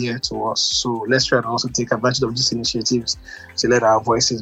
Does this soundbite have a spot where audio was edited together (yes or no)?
no